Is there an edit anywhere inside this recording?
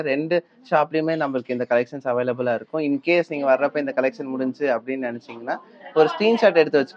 no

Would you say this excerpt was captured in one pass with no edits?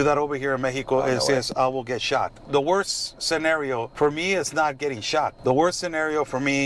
no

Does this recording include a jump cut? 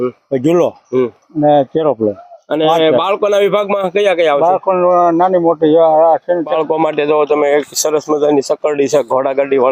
yes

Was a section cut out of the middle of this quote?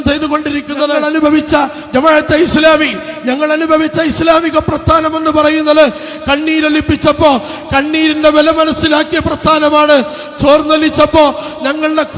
yes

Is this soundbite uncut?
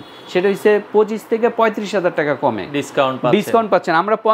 yes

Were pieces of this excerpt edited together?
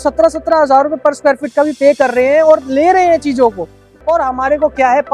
yes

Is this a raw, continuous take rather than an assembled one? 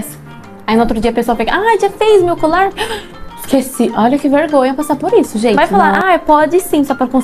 no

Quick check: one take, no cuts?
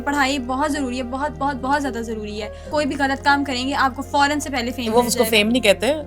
no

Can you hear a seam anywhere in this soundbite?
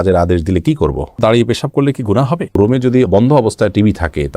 yes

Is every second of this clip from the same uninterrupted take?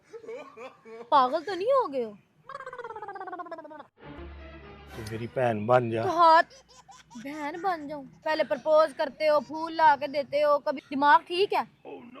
no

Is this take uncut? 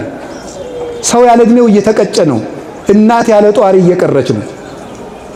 yes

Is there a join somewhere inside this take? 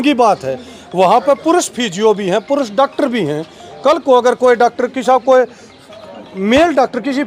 no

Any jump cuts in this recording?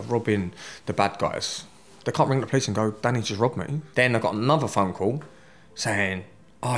yes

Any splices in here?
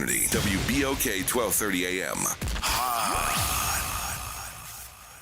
yes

